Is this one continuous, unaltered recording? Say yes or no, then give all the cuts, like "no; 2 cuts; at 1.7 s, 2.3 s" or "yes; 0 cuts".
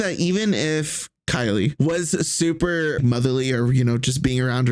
no; 2 cuts; at 1.8 s, 3.0 s